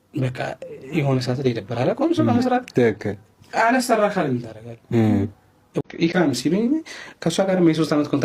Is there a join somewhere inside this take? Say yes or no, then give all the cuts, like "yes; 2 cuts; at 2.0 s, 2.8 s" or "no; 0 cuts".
yes; 1 cut; at 5.7 s